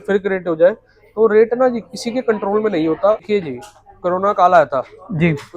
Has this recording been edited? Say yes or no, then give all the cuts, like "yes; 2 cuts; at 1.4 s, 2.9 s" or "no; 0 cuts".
yes; 1 cut; at 3.2 s